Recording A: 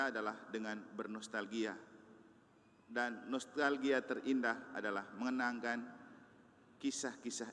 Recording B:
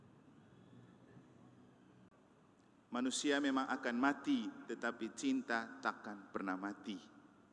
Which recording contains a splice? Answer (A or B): B